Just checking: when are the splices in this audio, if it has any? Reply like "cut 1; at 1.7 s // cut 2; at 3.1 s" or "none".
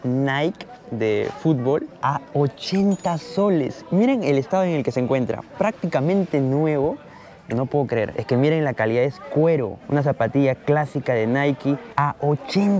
cut 1; at 8.2 s // cut 2; at 9.8 s // cut 3; at 11.9 s